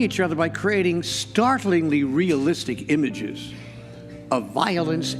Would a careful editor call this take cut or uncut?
uncut